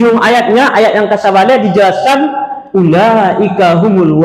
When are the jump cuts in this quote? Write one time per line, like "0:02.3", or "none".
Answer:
none

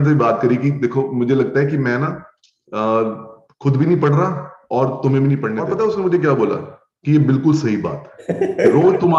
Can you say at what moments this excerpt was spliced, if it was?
0:05.6

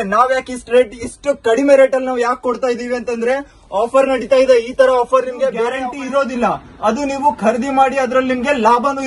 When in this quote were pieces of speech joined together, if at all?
0:05.9

